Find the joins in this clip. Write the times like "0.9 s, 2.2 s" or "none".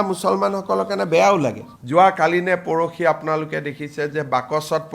1.7 s